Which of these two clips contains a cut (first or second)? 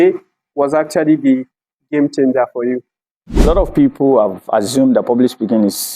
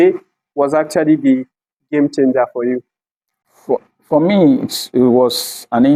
first